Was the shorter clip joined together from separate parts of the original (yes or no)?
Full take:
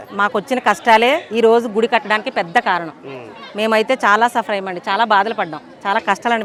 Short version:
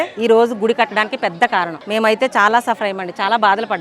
yes